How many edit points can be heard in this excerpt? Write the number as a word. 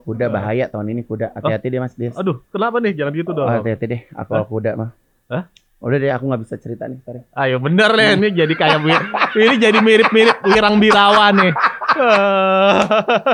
zero